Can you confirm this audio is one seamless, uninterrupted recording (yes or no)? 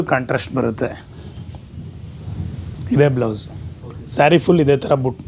yes